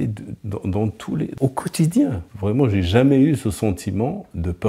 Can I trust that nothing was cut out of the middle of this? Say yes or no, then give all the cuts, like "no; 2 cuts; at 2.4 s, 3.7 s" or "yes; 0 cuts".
no; 1 cut; at 2.4 s